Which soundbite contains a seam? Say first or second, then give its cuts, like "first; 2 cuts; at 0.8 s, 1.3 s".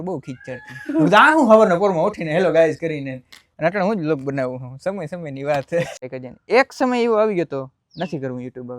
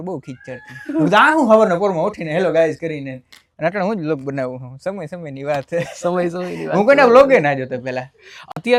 first; 1 cut; at 6.0 s